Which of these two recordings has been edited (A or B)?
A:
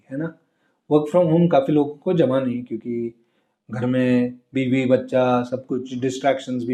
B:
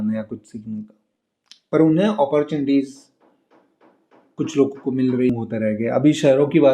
B